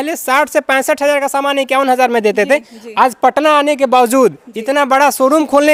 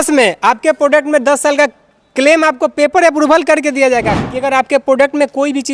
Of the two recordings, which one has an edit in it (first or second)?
second